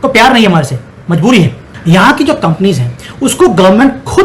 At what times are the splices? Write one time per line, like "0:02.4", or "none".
0:01.7